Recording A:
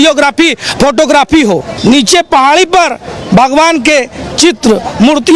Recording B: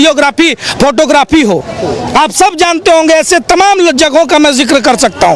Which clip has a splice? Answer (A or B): A